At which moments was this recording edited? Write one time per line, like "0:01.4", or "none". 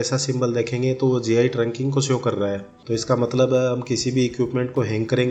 0:02.7